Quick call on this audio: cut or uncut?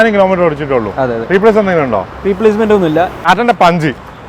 cut